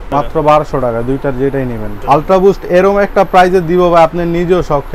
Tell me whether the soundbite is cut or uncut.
cut